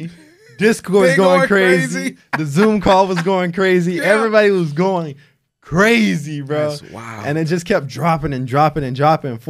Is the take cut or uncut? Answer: uncut